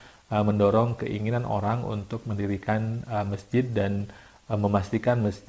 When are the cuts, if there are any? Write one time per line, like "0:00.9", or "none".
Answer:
none